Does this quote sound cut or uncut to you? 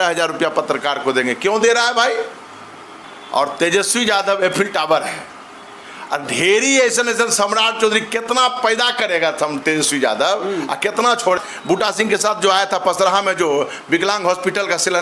cut